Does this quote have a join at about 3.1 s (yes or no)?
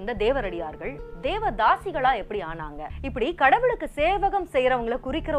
yes